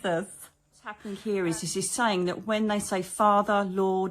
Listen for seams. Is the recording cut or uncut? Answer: cut